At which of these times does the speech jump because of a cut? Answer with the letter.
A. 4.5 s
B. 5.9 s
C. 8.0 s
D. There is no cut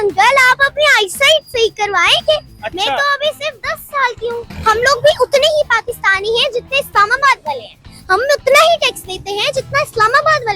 A